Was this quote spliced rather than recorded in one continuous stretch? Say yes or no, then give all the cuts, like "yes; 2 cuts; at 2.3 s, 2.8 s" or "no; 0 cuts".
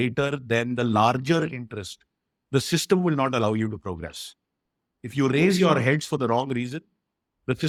no; 0 cuts